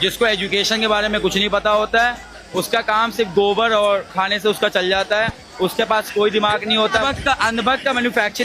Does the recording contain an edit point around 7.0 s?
yes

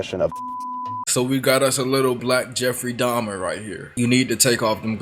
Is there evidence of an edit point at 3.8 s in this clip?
yes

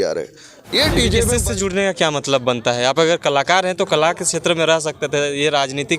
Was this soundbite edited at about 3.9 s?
no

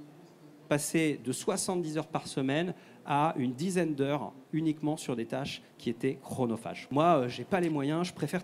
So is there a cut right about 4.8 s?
no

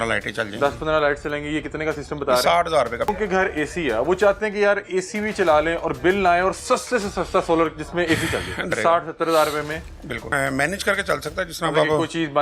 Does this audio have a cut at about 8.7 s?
yes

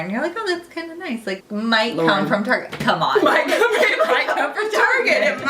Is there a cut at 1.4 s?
yes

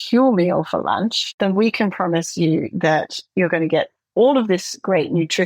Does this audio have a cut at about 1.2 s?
yes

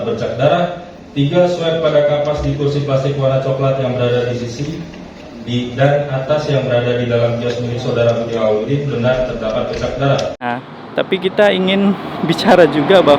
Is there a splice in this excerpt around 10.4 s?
yes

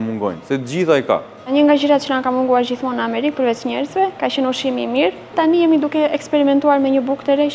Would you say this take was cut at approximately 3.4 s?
no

